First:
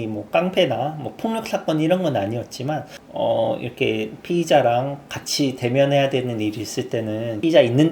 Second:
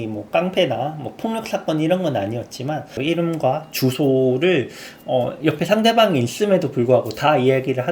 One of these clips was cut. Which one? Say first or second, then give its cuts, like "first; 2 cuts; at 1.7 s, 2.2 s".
second; 1 cut; at 3.0 s